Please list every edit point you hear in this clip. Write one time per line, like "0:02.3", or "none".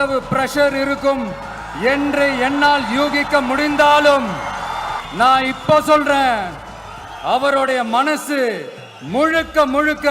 0:05.0